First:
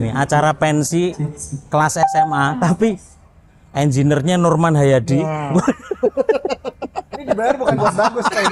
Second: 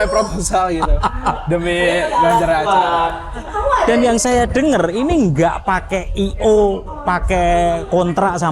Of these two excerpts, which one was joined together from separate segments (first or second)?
second